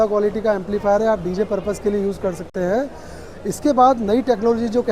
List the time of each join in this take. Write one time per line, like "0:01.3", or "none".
none